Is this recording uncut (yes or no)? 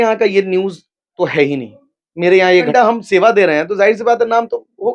no